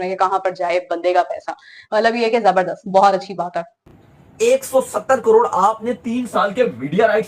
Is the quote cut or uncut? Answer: cut